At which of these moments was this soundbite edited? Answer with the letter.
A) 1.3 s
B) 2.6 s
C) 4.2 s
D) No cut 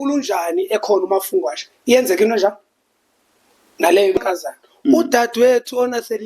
C